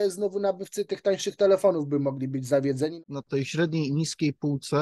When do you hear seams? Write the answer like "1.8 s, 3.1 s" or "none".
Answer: 3.0 s